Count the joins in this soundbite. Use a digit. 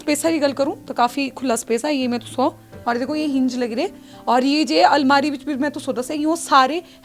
1